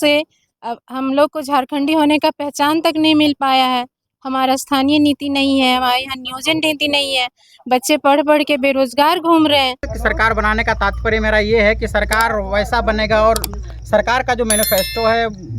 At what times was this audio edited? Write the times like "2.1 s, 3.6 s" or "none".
9.9 s